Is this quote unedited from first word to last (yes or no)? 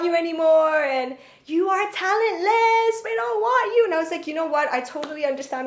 yes